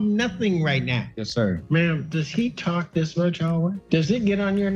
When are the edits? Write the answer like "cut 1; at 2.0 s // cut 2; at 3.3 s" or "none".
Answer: cut 1; at 1.5 s // cut 2; at 3.8 s